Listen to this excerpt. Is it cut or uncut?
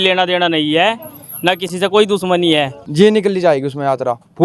cut